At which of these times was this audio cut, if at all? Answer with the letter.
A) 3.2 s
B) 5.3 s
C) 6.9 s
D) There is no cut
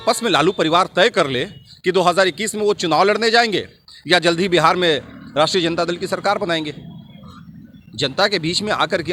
D